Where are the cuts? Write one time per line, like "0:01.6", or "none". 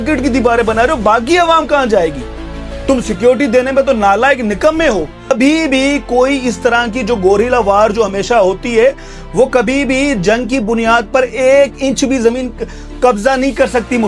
0:05.3